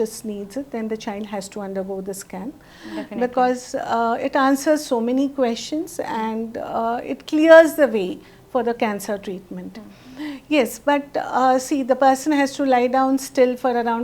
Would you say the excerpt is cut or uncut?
uncut